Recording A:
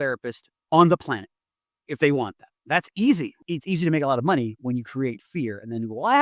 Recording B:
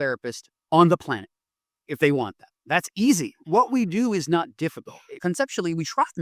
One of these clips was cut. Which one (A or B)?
A